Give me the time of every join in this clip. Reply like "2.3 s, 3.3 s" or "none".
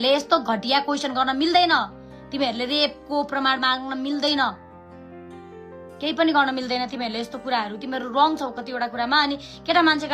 none